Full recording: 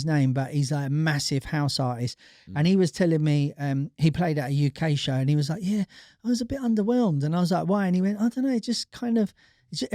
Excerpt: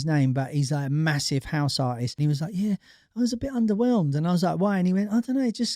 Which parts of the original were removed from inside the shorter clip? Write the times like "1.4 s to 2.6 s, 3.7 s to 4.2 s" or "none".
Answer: 2.2 s to 5.2 s